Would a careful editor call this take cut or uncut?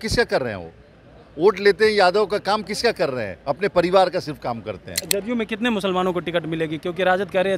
cut